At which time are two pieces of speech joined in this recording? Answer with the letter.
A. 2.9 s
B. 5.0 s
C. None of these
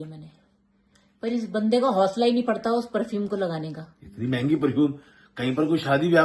C